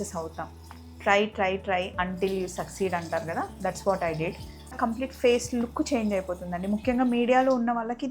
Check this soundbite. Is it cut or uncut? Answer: cut